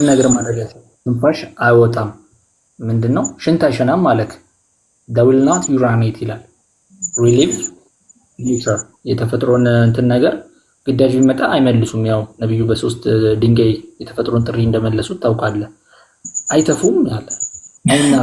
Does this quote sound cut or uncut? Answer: uncut